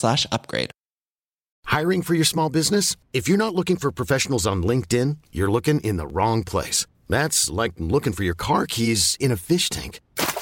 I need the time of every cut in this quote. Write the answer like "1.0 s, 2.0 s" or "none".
1.5 s